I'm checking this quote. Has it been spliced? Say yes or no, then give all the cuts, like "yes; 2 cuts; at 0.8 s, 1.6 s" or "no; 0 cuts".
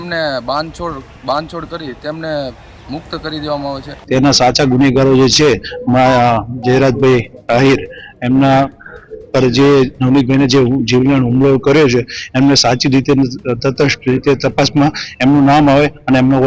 yes; 1 cut; at 3.9 s